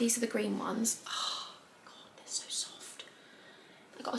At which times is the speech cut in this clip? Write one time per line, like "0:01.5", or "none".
none